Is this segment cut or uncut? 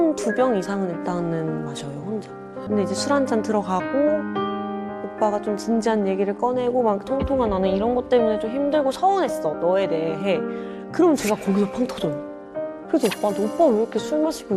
cut